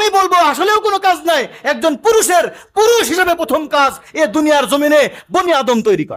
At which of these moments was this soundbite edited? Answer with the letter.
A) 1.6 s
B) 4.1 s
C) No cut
C